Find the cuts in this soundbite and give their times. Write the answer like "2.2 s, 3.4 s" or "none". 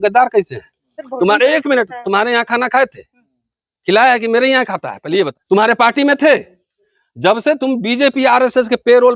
5.4 s